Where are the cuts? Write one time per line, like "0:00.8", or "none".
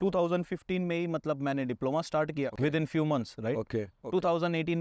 0:02.5
0:04.0